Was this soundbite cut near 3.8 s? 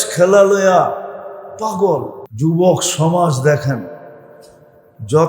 no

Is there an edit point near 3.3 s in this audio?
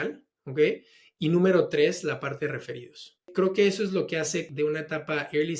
yes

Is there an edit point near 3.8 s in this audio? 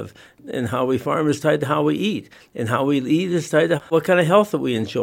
yes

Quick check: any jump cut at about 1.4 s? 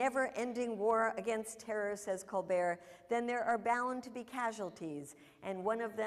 no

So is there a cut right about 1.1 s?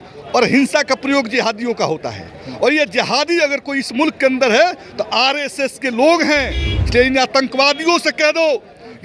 no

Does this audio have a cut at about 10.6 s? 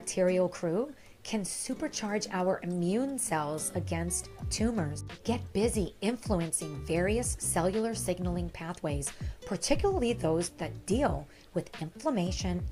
no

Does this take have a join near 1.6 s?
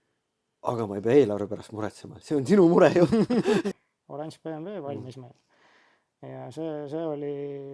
no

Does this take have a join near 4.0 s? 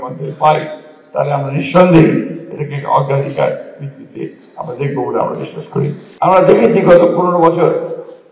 no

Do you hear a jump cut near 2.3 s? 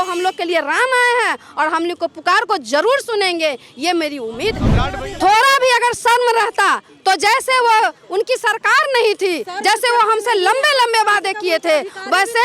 no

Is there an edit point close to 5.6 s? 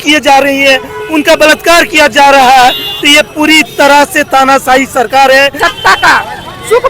yes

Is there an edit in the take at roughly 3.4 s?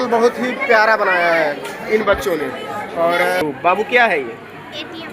yes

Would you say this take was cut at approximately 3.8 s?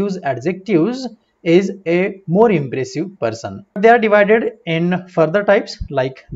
yes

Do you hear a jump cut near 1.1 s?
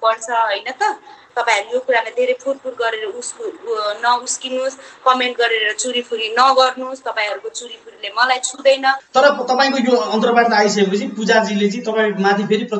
yes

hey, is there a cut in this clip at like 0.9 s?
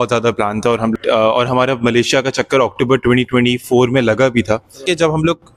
yes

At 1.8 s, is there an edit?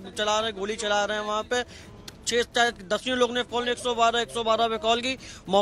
no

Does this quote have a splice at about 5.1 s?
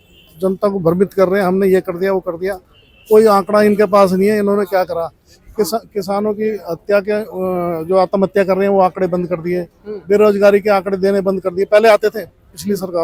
no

